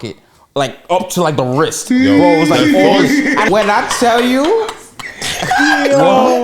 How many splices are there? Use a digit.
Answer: 1